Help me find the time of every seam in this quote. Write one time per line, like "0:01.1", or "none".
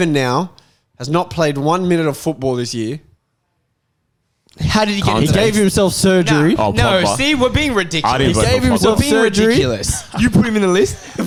none